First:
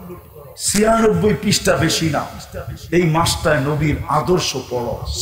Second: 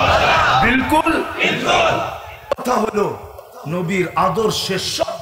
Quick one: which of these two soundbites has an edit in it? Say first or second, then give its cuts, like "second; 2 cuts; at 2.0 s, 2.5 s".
second; 1 cut; at 2.5 s